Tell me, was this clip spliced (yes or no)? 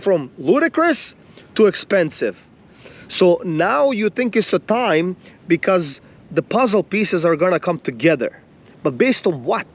no